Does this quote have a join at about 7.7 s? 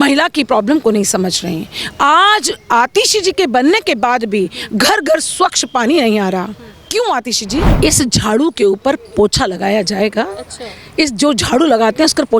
yes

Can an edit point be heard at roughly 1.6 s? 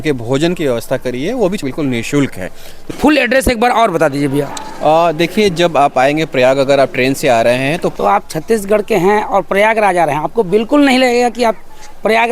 yes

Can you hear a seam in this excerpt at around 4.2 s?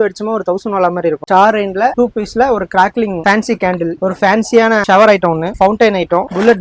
no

